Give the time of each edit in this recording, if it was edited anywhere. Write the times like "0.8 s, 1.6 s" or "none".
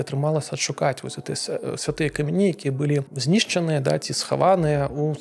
3.1 s